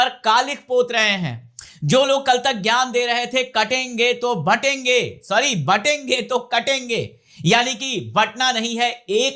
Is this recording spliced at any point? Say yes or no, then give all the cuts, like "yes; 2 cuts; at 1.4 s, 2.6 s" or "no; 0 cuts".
no; 0 cuts